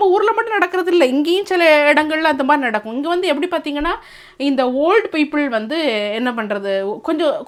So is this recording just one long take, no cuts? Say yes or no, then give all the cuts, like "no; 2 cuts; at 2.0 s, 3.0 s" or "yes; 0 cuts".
yes; 0 cuts